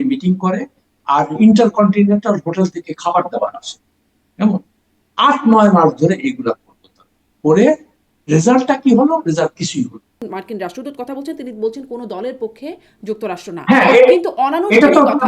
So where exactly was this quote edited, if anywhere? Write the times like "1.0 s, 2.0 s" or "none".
10.2 s